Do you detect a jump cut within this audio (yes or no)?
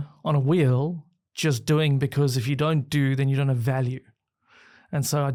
no